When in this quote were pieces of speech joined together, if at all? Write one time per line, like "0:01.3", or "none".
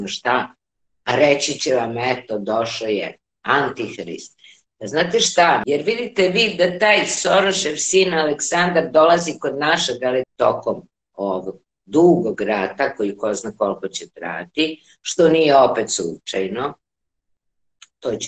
0:05.6
0:10.3